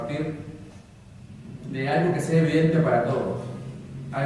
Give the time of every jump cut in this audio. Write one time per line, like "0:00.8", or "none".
none

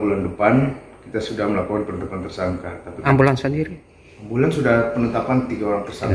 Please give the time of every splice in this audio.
0:03.0

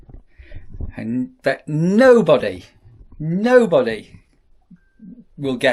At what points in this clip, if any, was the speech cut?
none

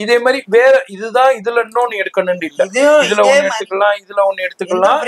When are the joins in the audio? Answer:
none

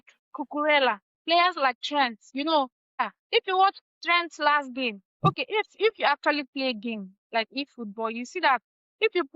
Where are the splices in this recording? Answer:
0:02.2
0:03.0

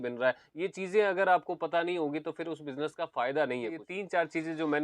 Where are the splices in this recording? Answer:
0:03.8

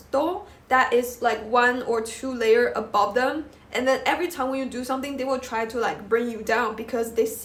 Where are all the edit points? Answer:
none

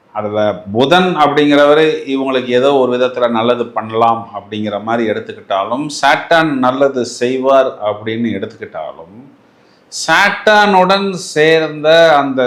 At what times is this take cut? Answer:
none

